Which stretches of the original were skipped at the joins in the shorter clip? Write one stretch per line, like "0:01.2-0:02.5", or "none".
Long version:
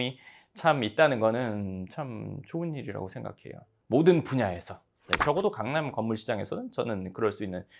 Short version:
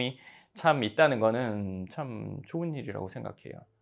none